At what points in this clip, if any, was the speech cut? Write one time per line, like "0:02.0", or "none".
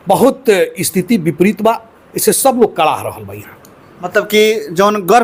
none